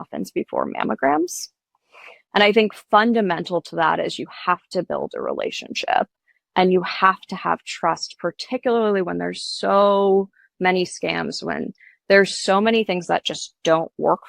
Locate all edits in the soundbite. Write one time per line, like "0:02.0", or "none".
none